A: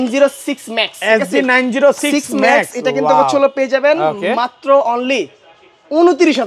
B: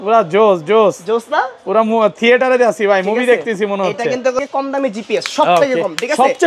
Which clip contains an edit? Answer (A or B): B